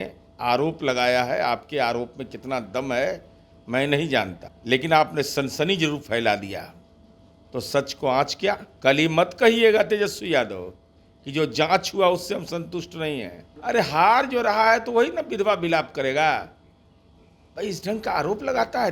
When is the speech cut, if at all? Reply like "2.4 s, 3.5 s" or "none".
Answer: 4.5 s, 8.7 s, 13.4 s